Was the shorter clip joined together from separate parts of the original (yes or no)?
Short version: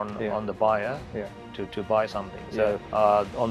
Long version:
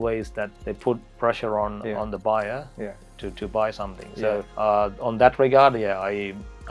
no